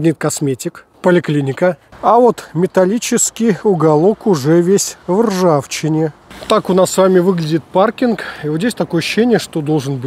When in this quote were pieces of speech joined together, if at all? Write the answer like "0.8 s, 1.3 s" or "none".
1.9 s